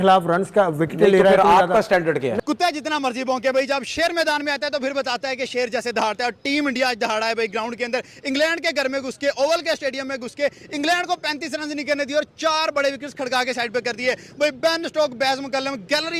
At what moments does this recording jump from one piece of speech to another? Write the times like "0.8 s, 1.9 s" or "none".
2.4 s